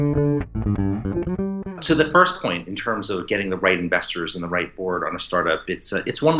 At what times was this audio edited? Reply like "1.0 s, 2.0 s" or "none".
1.8 s